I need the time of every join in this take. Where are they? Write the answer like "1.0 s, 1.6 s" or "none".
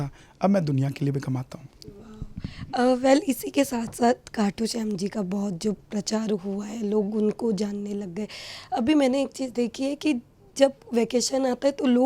none